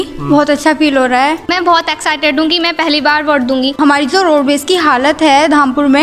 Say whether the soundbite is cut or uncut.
cut